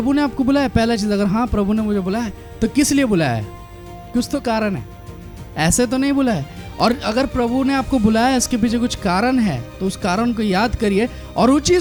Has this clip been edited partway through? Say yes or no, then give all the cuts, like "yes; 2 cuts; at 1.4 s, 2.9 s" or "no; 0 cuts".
no; 0 cuts